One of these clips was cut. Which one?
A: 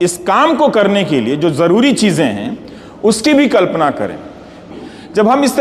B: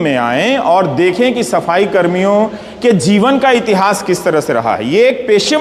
A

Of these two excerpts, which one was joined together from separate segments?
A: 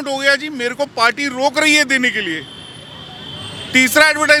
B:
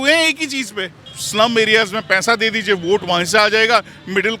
B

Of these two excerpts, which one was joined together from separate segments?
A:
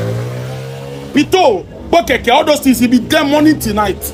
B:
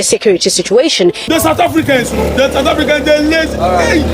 B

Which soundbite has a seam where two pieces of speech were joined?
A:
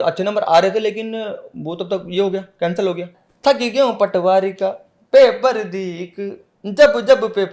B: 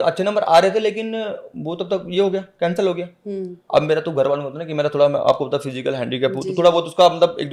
A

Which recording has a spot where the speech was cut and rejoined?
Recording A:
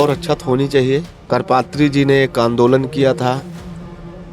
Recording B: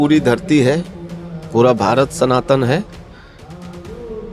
A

